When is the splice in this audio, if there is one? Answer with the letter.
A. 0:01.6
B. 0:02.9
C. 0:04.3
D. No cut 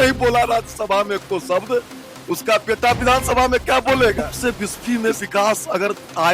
C